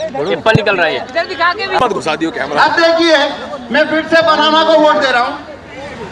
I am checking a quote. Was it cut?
yes; 1 cut; at 1.8 s

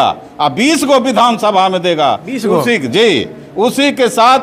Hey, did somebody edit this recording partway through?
no; 0 cuts

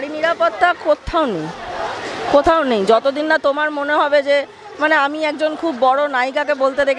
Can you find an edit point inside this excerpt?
no; 0 cuts

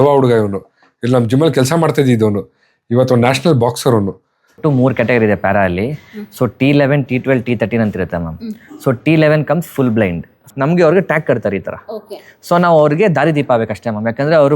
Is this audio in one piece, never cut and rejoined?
no; 2 cuts; at 4.6 s, 10.5 s

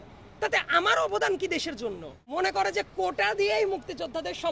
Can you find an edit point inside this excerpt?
yes; 1 cut; at 2.1 s

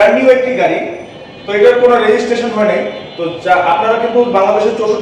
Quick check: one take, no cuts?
yes; 0 cuts

